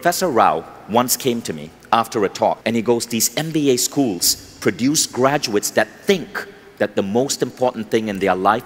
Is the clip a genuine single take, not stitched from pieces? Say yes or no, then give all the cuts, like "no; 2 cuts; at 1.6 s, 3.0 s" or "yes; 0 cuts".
no; 1 cut; at 2.6 s